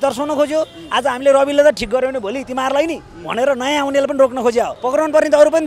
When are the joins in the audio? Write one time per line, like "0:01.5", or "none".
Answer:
0:04.8